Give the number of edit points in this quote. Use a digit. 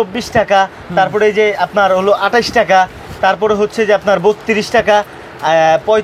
0